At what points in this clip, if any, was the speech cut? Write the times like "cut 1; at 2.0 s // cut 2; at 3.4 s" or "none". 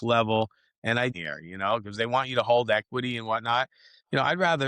cut 1; at 1.1 s

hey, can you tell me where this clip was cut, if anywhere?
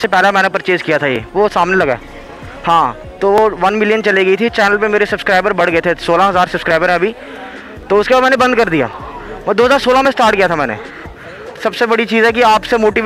cut 1; at 11.6 s

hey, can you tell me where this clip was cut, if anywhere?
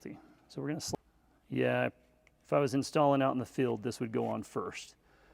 cut 1; at 1.0 s

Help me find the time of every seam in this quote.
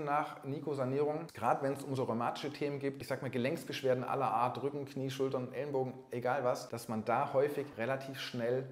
cut 1; at 1.3 s // cut 2; at 3.0 s // cut 3; at 6.7 s // cut 4; at 7.7 s

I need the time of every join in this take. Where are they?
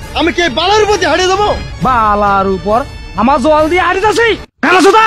none

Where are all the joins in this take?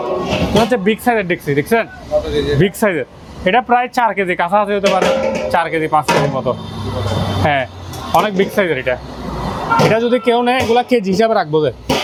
none

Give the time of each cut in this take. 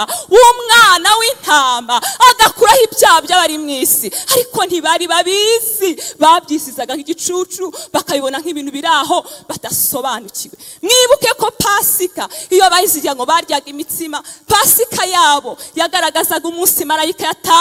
none

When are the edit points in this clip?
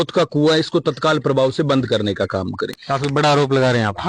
cut 1; at 2.8 s

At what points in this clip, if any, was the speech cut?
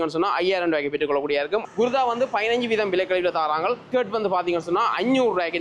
cut 1; at 1.6 s // cut 2; at 3.9 s

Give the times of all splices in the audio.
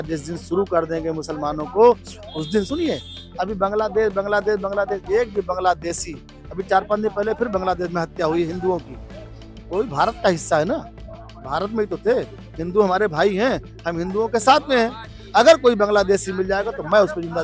none

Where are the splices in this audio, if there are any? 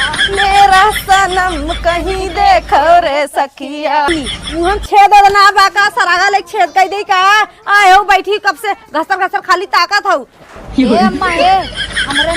cut 1; at 4.1 s

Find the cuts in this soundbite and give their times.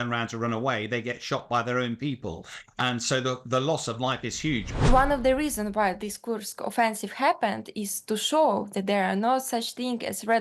cut 1; at 4.7 s

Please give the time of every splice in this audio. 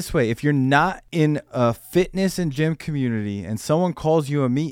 cut 1; at 1.0 s

